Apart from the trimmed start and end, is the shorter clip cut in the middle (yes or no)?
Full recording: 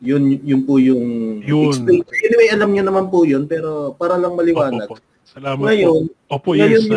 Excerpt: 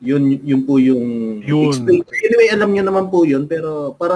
no